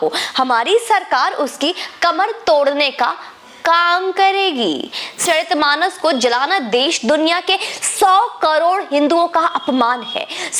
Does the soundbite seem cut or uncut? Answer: cut